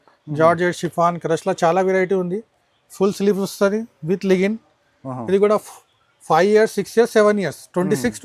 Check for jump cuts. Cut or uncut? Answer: uncut